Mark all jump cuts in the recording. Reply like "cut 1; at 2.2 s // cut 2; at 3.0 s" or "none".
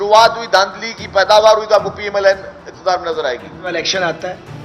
cut 1; at 3.7 s